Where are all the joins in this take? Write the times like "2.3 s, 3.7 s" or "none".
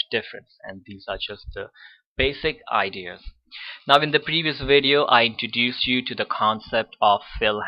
none